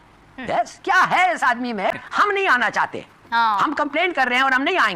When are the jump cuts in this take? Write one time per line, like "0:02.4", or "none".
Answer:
0:01.9